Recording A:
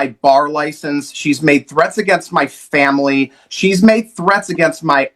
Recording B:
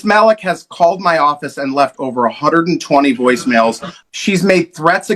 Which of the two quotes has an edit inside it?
B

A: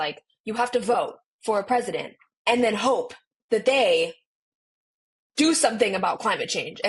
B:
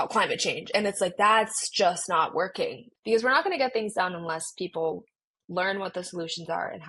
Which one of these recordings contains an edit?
B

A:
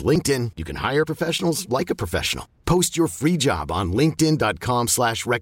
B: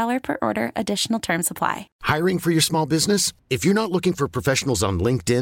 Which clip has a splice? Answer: B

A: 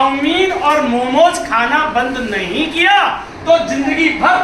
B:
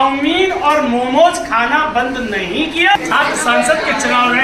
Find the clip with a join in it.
B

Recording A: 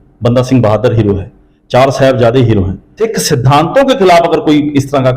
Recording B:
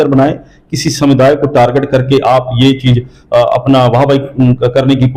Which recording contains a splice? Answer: A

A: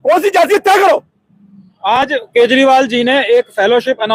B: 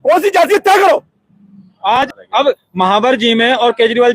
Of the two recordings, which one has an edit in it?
B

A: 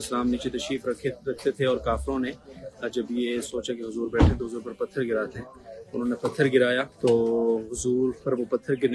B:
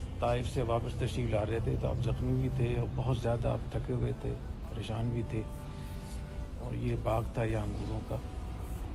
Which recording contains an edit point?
A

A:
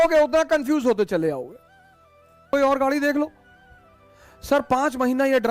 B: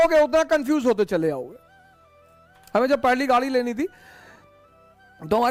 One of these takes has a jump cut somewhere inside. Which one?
A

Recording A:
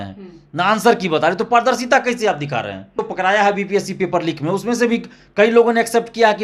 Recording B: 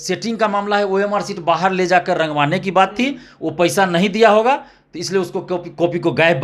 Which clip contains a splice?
A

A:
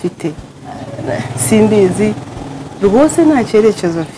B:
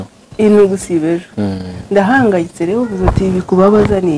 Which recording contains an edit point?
A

